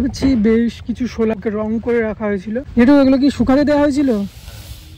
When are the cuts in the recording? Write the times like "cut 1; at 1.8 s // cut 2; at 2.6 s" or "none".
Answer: cut 1; at 1.3 s // cut 2; at 2.7 s